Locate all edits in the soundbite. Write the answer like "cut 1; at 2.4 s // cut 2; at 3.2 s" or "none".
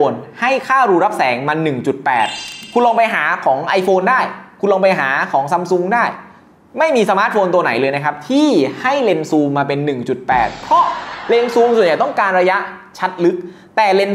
cut 1; at 2.5 s